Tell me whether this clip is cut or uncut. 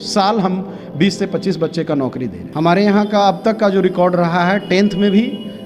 cut